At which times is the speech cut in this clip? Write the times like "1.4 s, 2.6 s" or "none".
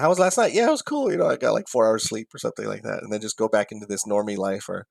none